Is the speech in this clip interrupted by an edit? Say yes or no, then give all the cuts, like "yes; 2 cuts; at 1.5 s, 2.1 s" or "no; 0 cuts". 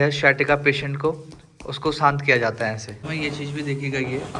yes; 1 cut; at 3.0 s